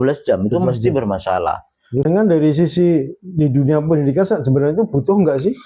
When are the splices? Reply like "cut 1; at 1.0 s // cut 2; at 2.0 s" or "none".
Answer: cut 1; at 2.1 s